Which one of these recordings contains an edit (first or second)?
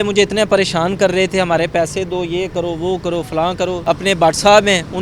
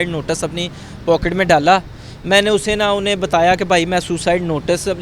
first